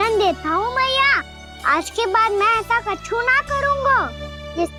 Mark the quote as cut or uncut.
uncut